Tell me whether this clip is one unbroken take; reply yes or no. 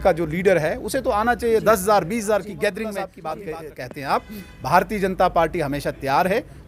no